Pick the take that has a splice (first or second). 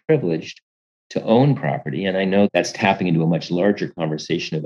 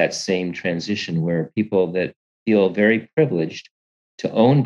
first